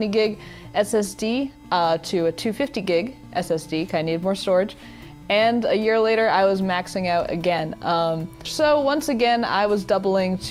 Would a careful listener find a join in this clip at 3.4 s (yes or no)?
no